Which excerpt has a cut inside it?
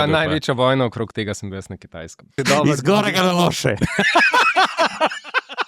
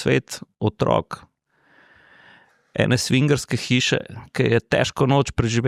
first; 1 cut; at 2.3 s

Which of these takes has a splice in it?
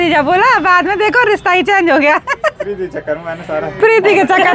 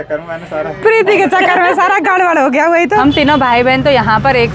second; 1 cut; at 3.0 s

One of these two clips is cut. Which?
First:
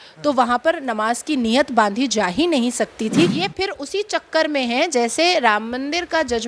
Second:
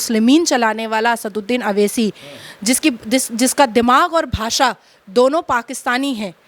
first; 1 cut; at 3.4 s

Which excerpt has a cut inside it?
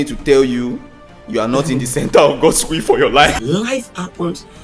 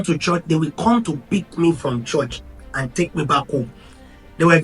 first; 1 cut; at 3.3 s

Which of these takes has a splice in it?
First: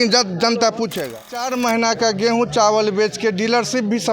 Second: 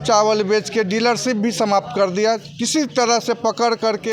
first; 1 cut; at 1.4 s

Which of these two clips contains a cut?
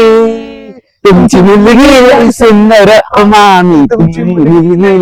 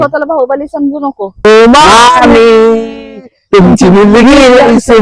second; 1 cut; at 1.4 s

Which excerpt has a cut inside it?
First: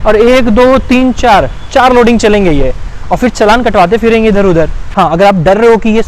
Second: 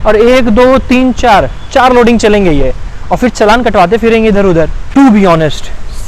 first; 1 cut; at 4.9 s

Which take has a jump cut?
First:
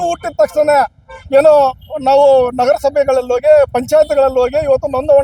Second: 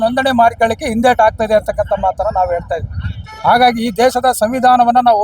second; 1 cut; at 3.1 s

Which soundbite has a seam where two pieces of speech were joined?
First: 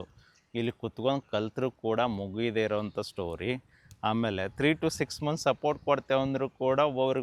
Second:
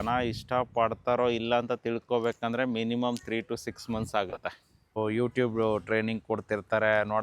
second; 1 cut; at 5.0 s

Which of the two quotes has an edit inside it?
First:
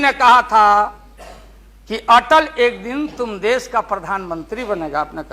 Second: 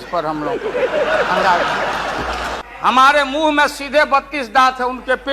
second; 1 cut; at 2.5 s

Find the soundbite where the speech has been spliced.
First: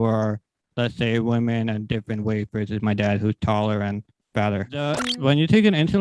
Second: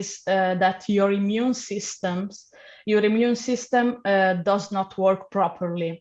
first; 1 cut; at 5.0 s

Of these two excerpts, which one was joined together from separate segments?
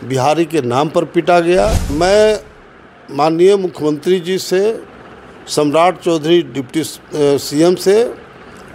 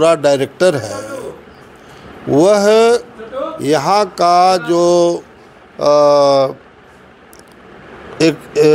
first; 1 cut; at 1.9 s

